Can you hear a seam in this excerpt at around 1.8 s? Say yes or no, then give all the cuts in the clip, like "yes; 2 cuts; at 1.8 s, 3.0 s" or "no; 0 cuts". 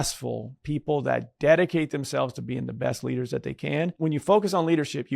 no; 1 cut; at 3.9 s